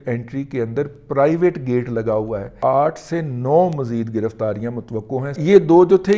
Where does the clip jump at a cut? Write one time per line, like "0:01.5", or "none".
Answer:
0:02.5
0:05.4